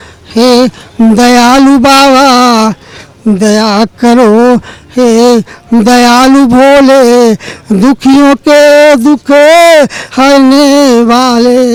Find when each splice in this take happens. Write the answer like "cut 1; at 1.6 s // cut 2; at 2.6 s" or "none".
none